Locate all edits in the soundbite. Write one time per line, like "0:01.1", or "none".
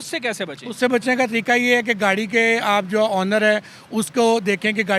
none